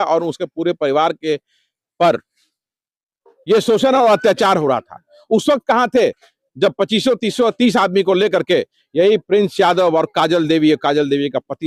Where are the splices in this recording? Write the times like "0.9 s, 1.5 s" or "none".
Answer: none

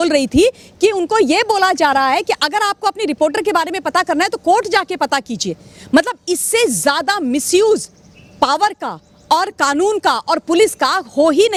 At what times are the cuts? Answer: none

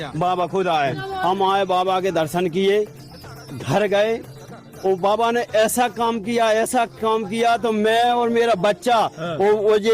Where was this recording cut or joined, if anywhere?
1.1 s

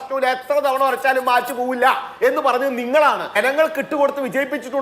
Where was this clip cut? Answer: 3.4 s

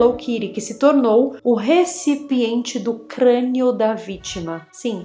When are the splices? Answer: none

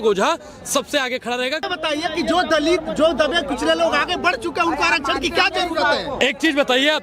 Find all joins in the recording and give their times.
1.7 s

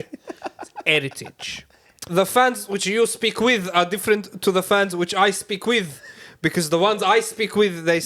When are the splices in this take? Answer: 2.0 s

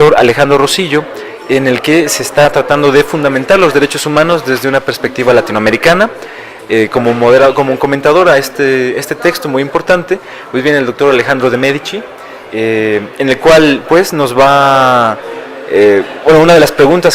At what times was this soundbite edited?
1.3 s

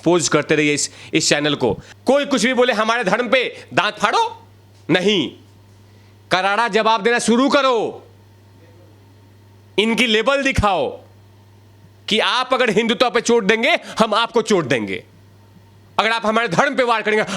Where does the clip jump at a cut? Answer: 1.9 s

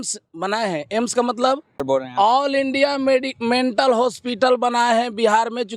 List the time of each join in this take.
1.8 s

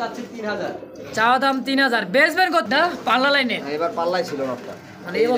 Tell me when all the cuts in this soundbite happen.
2.6 s

